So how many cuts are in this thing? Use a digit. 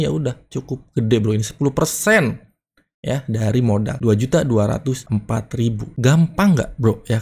2